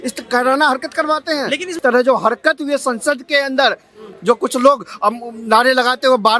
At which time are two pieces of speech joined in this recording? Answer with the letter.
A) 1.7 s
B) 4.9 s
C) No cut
A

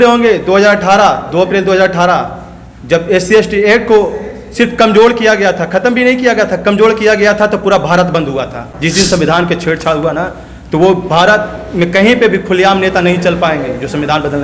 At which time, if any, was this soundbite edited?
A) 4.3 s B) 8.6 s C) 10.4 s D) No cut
B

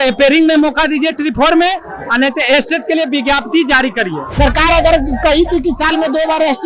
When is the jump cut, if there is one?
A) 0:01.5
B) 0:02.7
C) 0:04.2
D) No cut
C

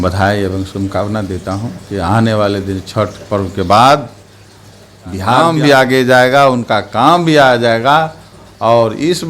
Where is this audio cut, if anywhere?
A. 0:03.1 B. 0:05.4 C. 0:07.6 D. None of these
B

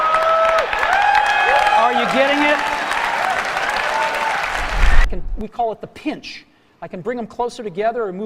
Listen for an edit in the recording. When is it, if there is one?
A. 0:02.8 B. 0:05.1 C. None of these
B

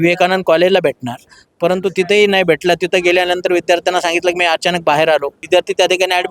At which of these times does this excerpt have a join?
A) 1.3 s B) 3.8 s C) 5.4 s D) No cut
C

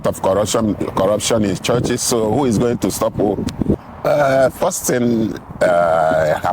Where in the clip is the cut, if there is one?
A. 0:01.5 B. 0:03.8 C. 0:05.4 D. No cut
B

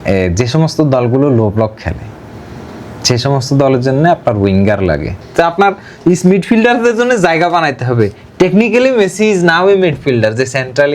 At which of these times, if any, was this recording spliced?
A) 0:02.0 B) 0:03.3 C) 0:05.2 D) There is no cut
C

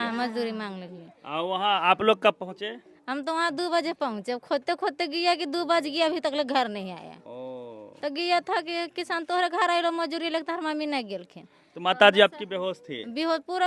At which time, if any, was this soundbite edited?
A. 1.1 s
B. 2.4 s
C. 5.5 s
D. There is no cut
D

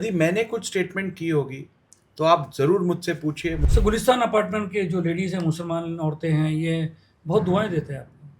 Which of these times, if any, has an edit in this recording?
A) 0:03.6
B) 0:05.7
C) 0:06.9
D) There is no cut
A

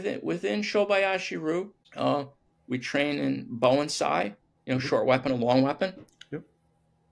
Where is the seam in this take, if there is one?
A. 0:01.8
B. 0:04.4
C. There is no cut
A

